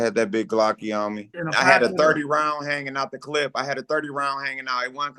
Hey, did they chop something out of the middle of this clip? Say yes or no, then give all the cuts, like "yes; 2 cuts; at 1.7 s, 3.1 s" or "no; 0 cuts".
yes; 1 cut; at 1.3 s